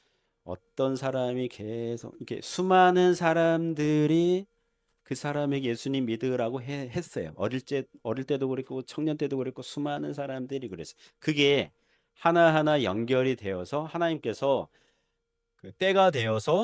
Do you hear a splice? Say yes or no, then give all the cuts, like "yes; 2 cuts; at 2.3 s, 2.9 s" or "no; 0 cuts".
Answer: no; 0 cuts